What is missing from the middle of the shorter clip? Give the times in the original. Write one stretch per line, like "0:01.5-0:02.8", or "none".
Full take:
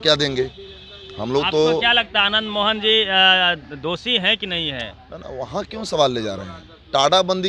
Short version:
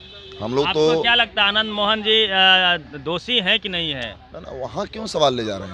none